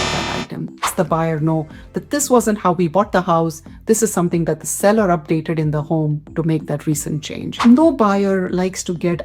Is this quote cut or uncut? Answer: cut